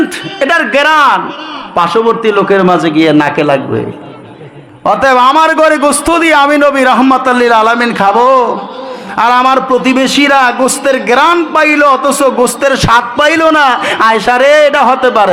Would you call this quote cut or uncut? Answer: uncut